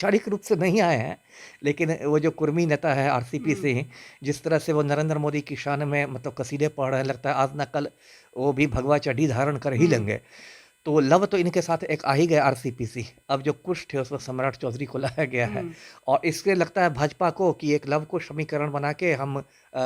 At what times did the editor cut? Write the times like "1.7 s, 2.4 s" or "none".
none